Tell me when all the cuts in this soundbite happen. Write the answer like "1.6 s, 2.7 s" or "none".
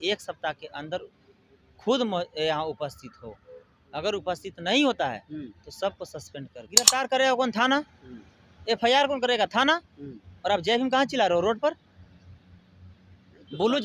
6.9 s